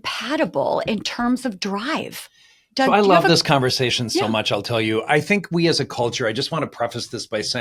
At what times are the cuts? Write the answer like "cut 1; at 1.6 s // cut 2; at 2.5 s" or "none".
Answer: none